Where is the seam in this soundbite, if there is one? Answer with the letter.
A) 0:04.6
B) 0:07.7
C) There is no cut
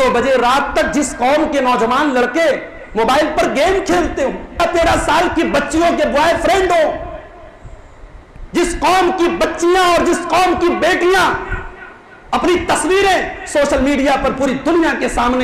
A